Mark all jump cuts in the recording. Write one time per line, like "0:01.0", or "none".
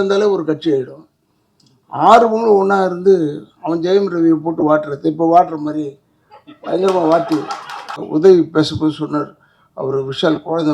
0:08.0

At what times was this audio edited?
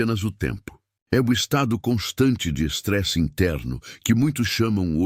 none

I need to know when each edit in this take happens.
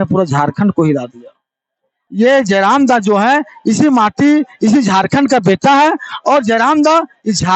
0:02.0

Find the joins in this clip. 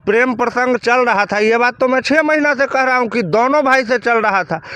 none

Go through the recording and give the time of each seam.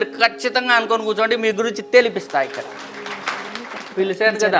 0:03.2

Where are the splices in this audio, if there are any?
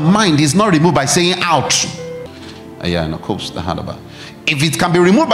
0:02.3

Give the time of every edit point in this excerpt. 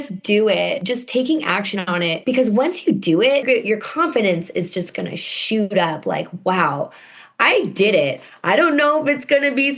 0:00.8
0:02.2
0:03.4

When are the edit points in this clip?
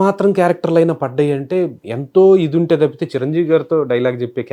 none

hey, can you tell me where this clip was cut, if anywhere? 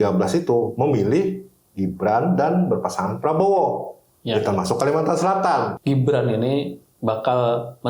0:05.7

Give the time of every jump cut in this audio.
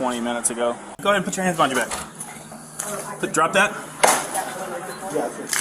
0:01.0

